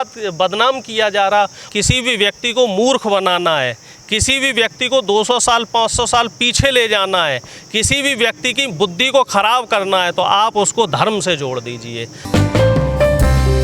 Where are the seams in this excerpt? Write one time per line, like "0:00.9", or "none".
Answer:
0:01.6